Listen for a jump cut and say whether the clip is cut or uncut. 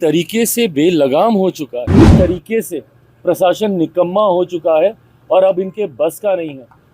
cut